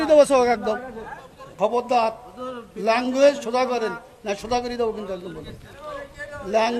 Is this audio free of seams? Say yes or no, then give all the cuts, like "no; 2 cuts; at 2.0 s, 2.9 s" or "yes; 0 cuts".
no; 1 cut; at 1.5 s